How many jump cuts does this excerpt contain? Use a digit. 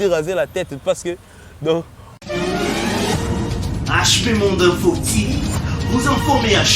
1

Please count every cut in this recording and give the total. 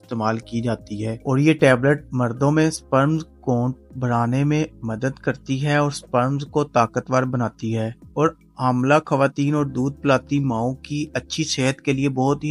0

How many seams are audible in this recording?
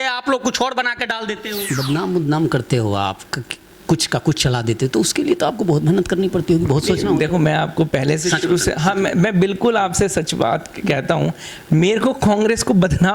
1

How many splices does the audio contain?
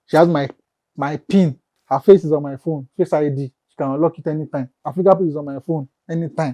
2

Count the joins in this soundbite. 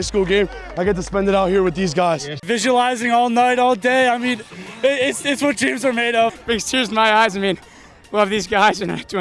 2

